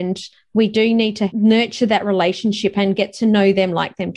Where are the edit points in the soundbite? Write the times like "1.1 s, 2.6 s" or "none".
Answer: 1.3 s